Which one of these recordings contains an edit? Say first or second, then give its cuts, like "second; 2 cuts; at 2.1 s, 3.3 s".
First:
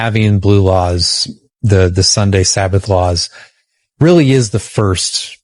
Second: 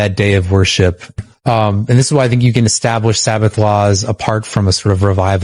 second; 1 cut; at 1.3 s